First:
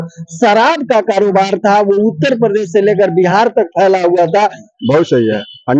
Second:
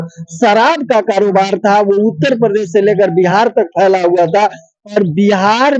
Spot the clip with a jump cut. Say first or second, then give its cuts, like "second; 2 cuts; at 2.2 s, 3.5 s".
first; 1 cut; at 4.7 s